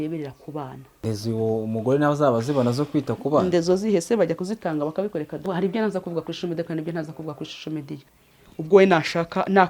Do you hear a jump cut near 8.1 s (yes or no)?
yes